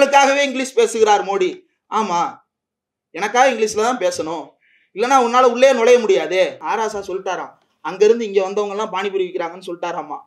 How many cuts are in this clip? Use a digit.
1